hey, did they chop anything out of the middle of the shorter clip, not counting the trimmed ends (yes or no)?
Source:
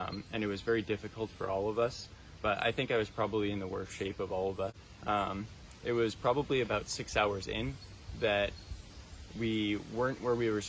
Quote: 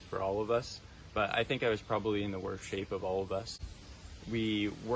yes